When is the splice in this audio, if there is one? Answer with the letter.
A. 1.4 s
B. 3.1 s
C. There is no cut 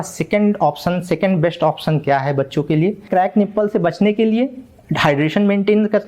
B